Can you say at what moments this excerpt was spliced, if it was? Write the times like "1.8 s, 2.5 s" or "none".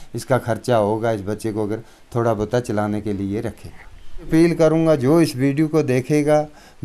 4.3 s

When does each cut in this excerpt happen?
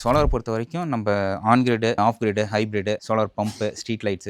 none

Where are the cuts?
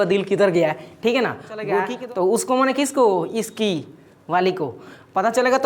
1.9 s

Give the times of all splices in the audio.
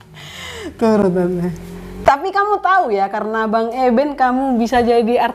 none

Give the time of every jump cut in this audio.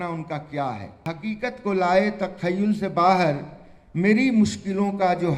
1.1 s

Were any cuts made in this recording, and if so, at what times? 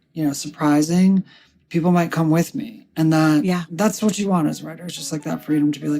1.6 s

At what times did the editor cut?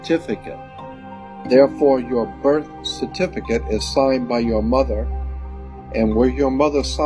1.0 s

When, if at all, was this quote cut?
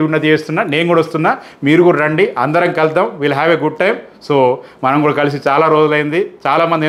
none

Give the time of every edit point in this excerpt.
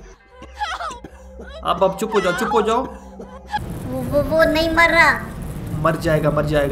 3.7 s

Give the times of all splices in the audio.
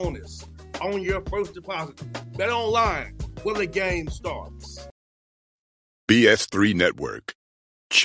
4.8 s

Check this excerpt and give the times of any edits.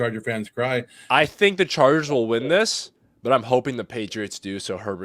1.0 s

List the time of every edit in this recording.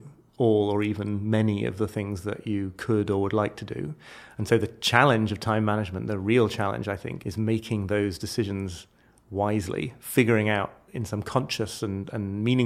7.1 s, 10.8 s

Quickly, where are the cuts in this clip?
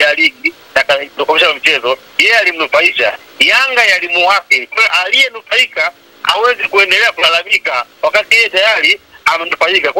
none

